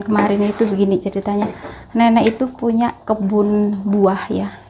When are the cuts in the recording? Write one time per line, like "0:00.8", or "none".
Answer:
none